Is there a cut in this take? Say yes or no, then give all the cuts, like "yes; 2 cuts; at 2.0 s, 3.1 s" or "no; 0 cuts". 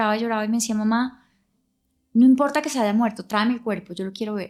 no; 0 cuts